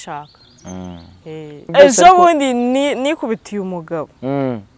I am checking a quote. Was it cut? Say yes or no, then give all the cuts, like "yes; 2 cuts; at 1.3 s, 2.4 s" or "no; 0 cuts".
yes; 1 cut; at 1.7 s